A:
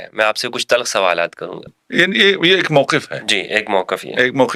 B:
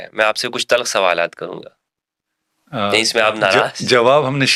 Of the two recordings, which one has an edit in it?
A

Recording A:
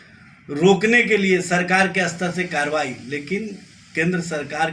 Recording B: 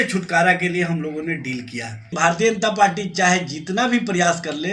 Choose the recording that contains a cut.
B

